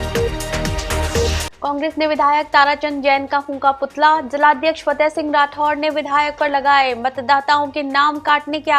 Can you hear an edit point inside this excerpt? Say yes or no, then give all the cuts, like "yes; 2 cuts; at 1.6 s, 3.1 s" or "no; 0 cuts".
yes; 1 cut; at 1.2 s